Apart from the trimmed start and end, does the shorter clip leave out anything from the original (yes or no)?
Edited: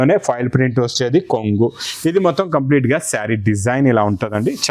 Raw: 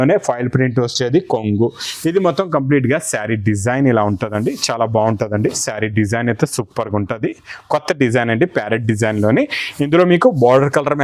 no